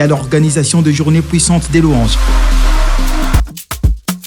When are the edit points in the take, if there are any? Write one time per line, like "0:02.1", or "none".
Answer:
0:03.3